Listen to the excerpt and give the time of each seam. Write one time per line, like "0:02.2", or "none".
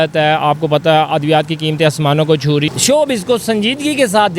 0:02.7

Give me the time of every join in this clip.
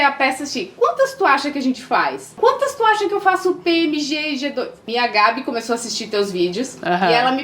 0:02.4
0:04.8

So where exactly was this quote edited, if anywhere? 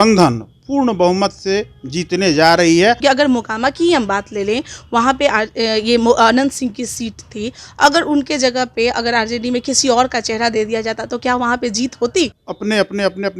0:03.0
0:12.5

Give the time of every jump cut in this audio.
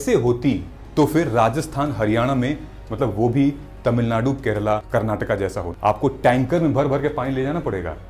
0:04.8
0:05.7

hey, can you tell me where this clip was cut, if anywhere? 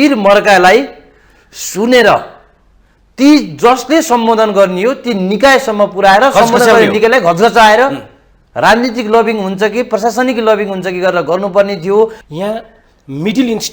0:12.2

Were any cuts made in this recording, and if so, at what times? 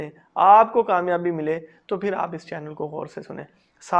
none

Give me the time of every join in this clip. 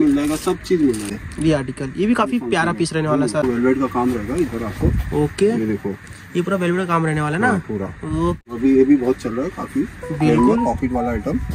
0:01.1
0:03.4
0:08.5

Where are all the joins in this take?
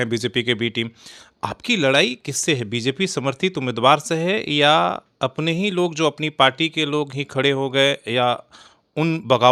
none

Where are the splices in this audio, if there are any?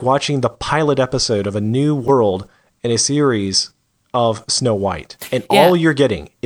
0:02.0

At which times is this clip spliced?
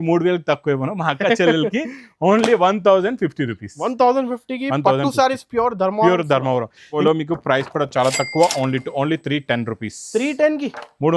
0:07.0

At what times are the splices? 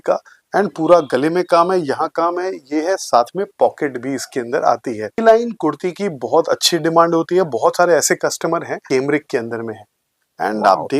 0:05.2
0:08.8

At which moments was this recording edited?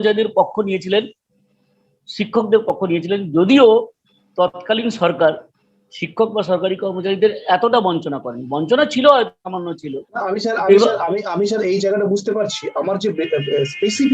none

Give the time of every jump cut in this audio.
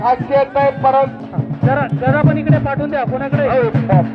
0:01.2

